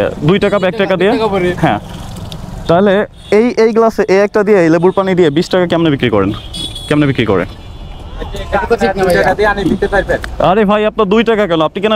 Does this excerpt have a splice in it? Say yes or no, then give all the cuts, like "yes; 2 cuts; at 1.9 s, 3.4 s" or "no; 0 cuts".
no; 0 cuts